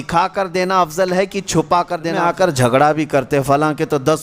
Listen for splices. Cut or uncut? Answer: cut